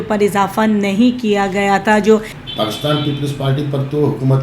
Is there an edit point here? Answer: yes; 1 cut; at 2.4 s

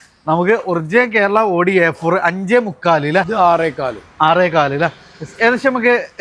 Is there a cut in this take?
yes; 1 cut; at 3.3 s

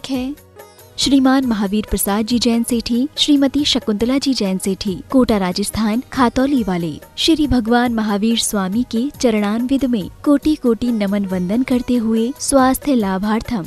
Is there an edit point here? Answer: no; 0 cuts

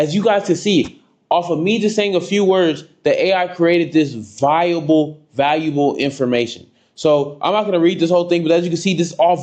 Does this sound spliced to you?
no; 0 cuts

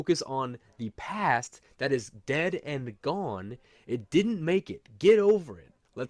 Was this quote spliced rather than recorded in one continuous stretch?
no; 0 cuts

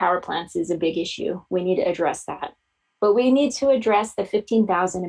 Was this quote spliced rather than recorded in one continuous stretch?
no; 0 cuts

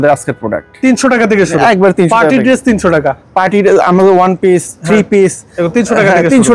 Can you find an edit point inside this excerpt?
no; 0 cuts

